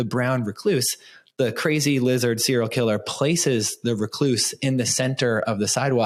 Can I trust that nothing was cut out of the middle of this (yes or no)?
yes